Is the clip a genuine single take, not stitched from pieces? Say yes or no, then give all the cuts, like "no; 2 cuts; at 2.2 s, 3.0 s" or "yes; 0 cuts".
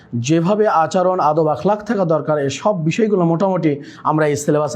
yes; 0 cuts